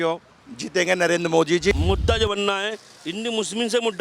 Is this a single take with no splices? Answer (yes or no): no